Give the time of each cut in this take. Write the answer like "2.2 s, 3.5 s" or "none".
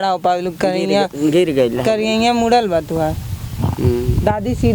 none